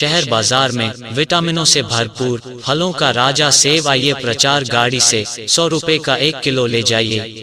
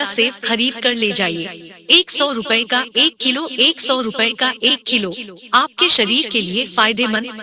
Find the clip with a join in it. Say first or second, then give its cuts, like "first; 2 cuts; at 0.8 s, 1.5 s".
first; 1 cut; at 2.3 s